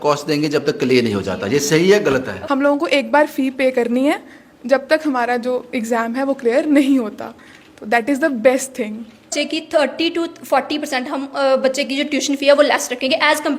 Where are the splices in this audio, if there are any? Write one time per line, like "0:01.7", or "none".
0:02.3
0:09.3